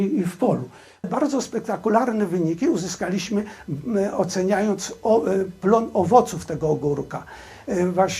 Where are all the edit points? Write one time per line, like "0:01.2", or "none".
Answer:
0:01.1